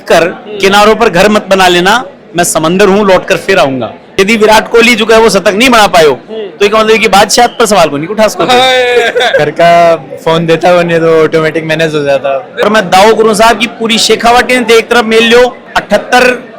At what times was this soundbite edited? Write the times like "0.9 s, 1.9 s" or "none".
4.0 s, 9.4 s, 12.5 s